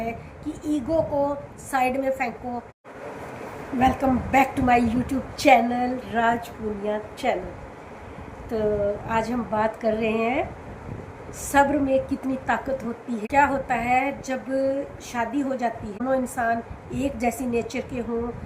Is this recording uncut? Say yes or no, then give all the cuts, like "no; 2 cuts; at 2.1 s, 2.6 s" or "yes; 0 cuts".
no; 3 cuts; at 2.8 s, 13.2 s, 16.0 s